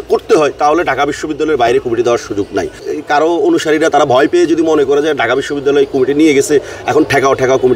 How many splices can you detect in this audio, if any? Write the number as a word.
one